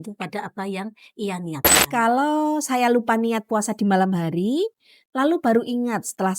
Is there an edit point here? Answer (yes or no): yes